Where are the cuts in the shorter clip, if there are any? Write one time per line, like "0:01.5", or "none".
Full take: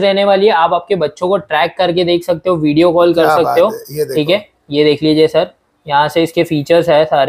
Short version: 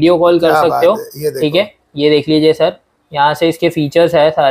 none

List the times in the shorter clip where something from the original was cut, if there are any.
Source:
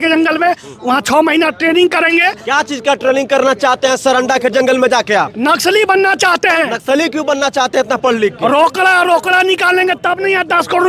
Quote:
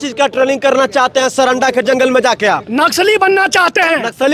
none

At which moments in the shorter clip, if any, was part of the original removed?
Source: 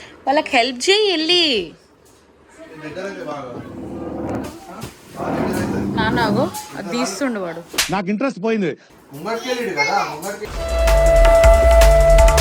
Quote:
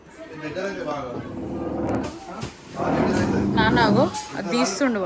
none

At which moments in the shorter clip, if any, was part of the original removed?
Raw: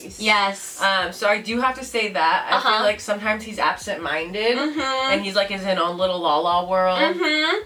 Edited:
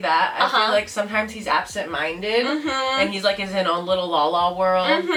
none

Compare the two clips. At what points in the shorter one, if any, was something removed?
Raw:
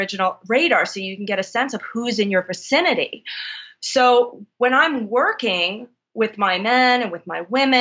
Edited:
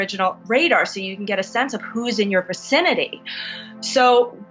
none

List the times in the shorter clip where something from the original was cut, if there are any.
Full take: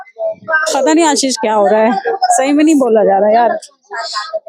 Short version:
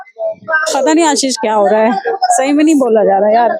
none

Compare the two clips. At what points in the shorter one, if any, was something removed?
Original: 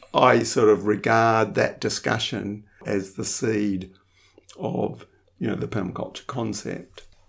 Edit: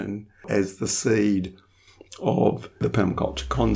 0:02.8

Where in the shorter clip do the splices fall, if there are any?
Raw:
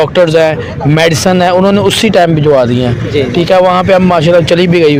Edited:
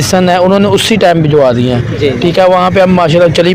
none

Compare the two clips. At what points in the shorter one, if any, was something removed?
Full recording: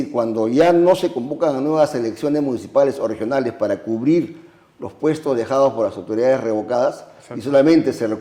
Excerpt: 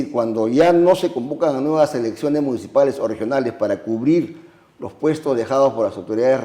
none

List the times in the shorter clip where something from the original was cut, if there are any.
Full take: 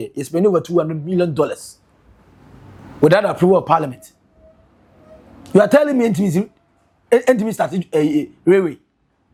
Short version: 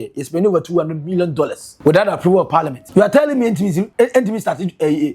0:01.6
0:02.8
0:03.9

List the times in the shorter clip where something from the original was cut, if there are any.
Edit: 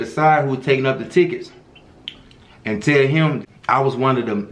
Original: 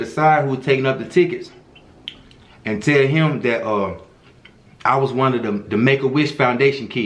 0:03.4

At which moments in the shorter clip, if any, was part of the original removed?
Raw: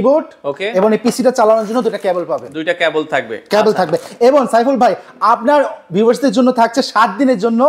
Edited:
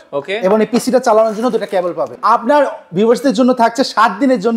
0:02.1

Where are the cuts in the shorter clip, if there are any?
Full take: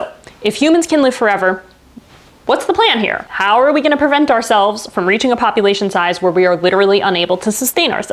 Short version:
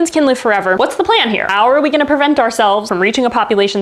0:01.4
0:02.9

